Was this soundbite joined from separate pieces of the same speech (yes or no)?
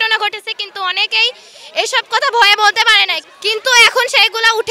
yes